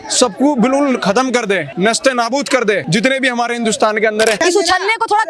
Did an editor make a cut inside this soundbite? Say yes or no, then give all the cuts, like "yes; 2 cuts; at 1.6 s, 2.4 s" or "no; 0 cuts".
yes; 3 cuts; at 1.7 s, 2.8 s, 4.4 s